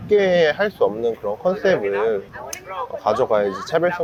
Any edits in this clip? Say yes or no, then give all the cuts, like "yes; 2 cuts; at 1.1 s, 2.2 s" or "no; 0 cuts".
no; 0 cuts